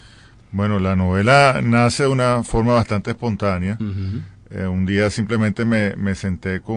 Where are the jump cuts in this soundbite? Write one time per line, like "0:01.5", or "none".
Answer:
0:04.7